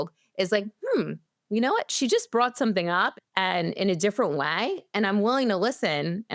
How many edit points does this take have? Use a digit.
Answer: 1